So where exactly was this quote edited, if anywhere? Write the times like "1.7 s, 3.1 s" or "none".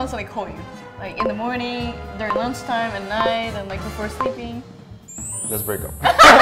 none